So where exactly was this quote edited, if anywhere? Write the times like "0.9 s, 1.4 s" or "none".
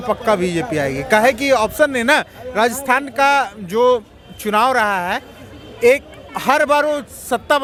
none